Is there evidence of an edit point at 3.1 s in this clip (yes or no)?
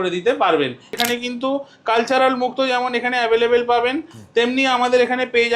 no